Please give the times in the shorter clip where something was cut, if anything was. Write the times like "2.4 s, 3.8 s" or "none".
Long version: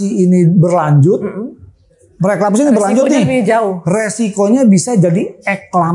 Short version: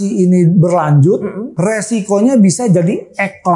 1.5 s

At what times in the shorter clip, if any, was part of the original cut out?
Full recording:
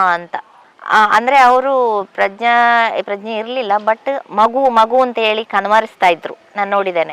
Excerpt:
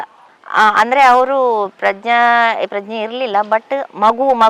none

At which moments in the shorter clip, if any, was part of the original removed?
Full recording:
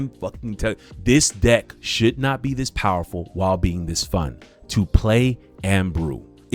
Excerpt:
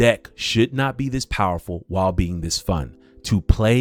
none

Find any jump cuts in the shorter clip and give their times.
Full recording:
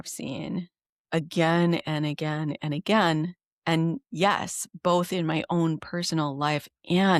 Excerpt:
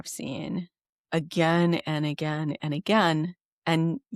none

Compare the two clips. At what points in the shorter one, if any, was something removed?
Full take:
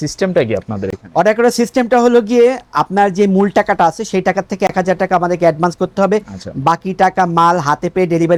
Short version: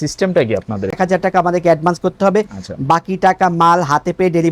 1.0 s

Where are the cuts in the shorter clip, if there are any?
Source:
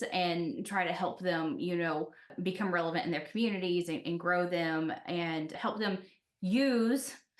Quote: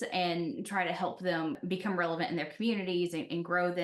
1.6 s

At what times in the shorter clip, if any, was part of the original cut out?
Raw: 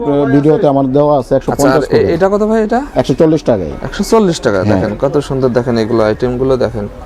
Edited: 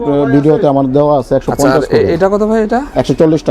none

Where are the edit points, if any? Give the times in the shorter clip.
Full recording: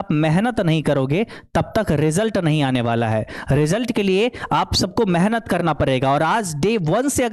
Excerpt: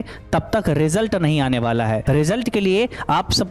2.0 s

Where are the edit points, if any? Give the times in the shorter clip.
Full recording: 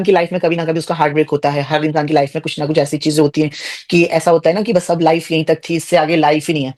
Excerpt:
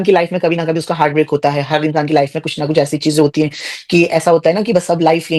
none

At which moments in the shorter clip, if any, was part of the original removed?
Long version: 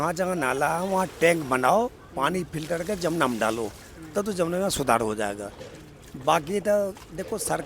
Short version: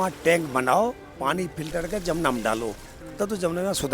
none

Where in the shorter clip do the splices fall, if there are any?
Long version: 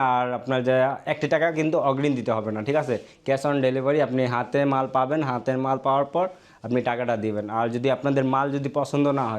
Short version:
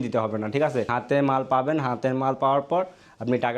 1.0 s

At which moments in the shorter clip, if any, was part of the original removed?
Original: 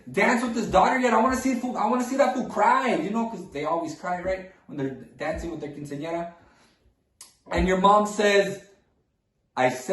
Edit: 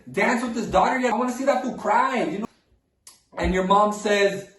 1.1 s, 2.4 s

